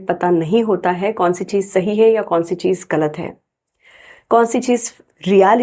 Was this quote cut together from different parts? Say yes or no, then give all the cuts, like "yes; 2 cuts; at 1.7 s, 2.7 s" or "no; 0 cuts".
no; 0 cuts